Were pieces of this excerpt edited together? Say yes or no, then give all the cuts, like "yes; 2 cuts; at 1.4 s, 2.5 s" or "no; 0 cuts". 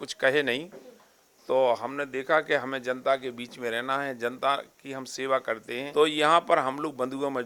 yes; 1 cut; at 5.8 s